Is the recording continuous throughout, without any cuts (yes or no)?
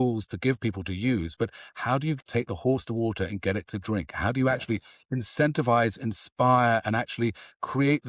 no